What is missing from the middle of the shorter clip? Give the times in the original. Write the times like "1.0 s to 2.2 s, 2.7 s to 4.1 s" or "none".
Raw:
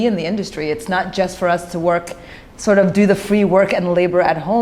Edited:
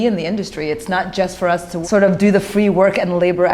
1.7 s to 2.5 s